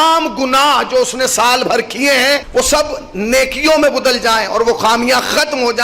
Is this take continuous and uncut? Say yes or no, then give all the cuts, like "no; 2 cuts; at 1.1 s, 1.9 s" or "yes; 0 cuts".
no; 1 cut; at 2.5 s